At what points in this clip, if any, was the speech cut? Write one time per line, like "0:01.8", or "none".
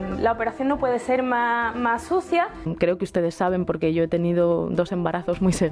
0:02.7